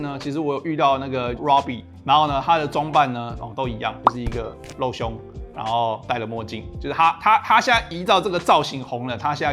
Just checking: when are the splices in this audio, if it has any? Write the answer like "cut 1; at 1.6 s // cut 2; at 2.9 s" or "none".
none

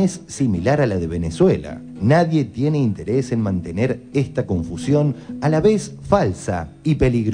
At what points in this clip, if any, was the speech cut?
none

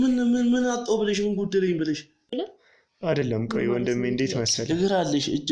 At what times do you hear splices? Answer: cut 1; at 2.3 s

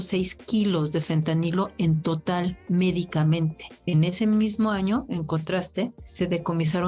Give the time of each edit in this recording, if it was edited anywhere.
cut 1; at 3.7 s // cut 2; at 6.0 s

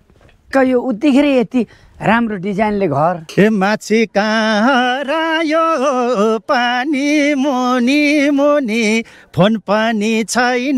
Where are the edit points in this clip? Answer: cut 1; at 3.3 s

